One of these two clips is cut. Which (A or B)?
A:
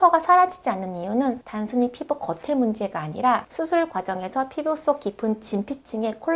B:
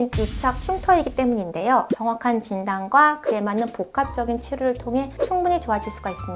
B